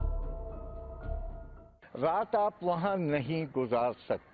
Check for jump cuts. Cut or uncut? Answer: cut